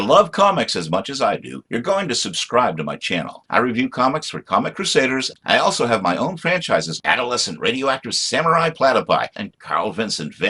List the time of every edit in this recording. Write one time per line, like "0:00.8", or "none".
none